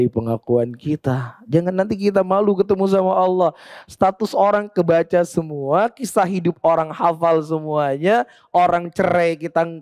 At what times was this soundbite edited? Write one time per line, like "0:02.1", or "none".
none